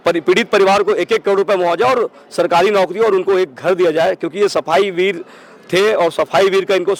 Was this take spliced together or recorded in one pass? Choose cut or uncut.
uncut